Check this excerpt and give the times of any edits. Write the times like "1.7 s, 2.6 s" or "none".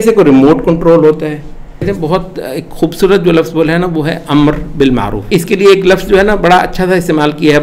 1.9 s, 5.2 s